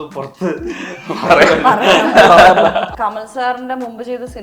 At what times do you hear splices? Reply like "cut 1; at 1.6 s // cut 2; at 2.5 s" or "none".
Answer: cut 1; at 2.9 s